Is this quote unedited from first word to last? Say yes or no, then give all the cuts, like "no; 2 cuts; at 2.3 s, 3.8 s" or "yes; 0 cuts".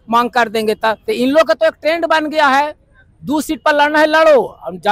no; 1 cut; at 1.0 s